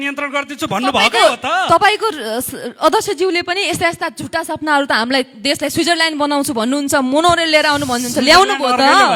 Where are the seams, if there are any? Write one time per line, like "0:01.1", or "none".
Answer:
none